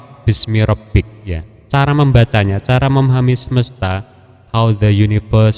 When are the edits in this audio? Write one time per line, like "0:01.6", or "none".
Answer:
none